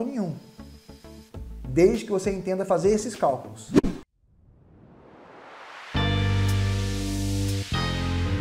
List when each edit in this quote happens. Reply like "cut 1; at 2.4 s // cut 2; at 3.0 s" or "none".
cut 1; at 3.5 s